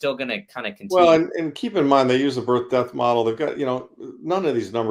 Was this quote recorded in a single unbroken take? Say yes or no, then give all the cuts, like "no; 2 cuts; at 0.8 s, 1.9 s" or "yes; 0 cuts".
yes; 0 cuts